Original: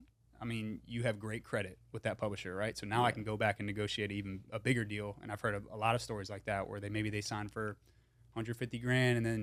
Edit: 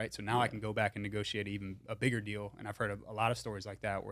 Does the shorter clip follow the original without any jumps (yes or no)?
yes